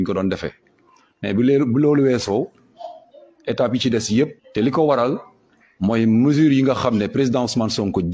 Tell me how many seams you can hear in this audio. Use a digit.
1